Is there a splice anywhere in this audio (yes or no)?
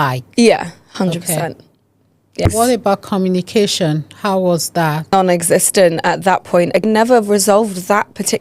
yes